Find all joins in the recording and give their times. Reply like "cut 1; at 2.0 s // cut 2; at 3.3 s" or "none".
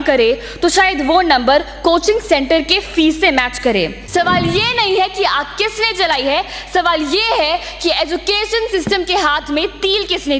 cut 1; at 4.0 s